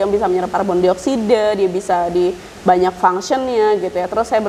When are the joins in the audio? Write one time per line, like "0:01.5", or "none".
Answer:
none

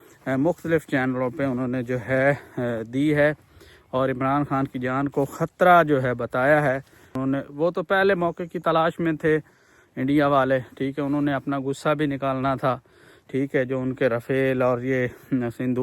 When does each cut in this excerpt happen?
0:07.1

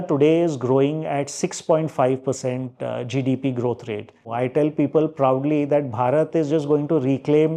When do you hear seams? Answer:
0:04.3

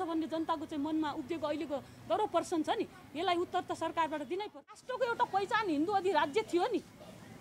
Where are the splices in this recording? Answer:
0:04.8

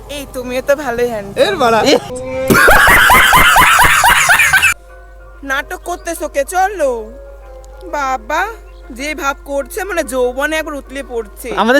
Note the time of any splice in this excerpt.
0:04.7

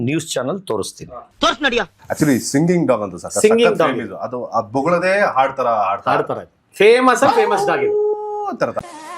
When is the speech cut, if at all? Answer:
0:02.0

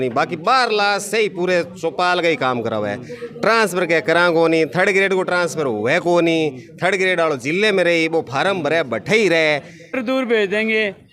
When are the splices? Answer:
0:10.0

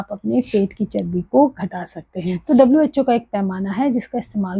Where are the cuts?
0:02.4

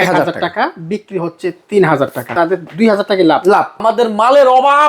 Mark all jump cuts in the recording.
0:02.3
0:03.8

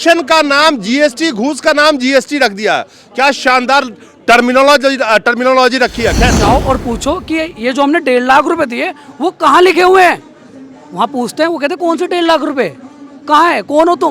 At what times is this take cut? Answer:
0:06.3

